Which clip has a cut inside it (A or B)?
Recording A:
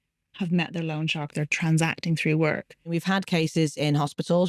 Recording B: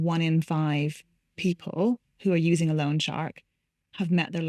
A